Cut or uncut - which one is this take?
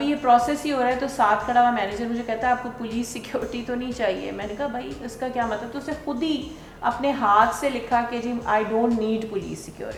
uncut